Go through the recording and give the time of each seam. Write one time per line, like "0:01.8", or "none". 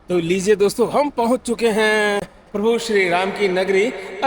none